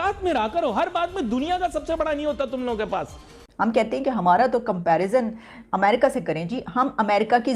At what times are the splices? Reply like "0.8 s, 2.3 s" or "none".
3.4 s